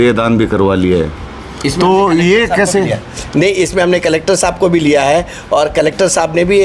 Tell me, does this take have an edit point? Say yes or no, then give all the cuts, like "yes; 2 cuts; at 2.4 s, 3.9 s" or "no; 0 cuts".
no; 0 cuts